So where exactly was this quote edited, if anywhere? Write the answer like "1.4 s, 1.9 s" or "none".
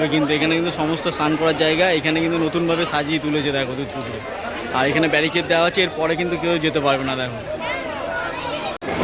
none